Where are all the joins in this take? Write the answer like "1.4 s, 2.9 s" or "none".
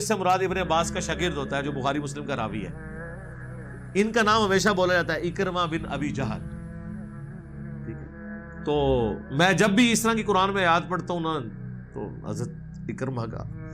2.7 s, 3.9 s, 6.3 s, 8.7 s